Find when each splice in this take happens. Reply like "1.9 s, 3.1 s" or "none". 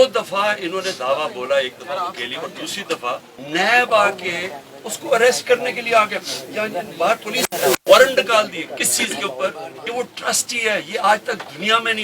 3.3 s, 9.8 s